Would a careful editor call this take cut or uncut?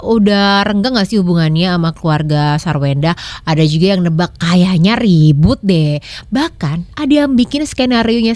uncut